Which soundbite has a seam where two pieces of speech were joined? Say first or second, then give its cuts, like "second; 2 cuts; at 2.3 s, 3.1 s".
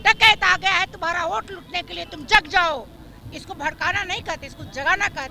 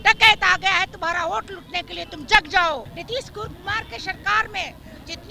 second; 1 cut; at 2.9 s